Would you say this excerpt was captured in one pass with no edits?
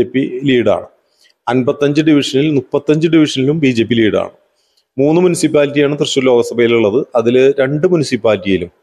yes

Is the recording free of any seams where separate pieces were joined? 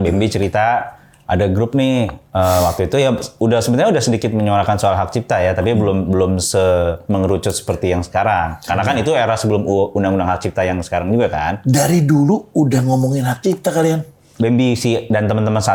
yes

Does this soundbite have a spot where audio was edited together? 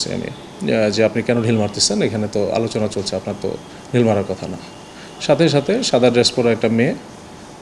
no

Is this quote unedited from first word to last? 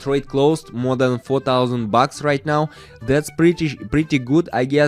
yes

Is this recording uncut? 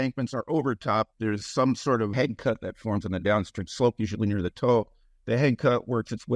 no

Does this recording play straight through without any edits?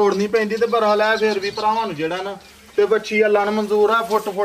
yes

